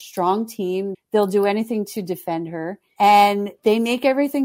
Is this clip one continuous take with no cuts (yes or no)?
no